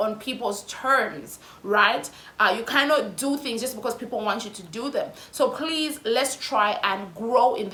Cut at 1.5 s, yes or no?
no